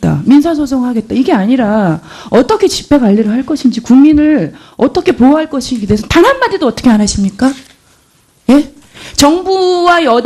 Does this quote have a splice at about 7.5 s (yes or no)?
no